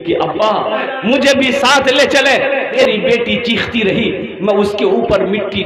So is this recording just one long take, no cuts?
no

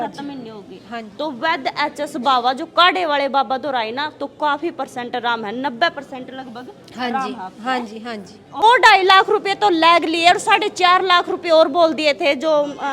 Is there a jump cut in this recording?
yes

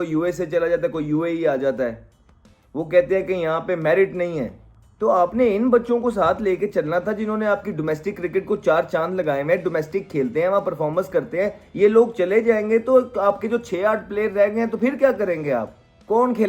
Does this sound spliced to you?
no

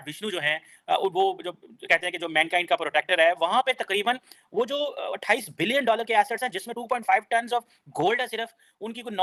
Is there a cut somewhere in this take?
no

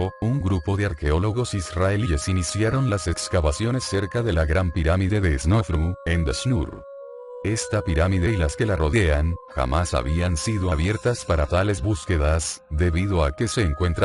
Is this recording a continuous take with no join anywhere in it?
yes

